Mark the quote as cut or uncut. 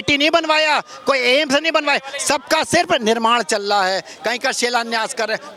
uncut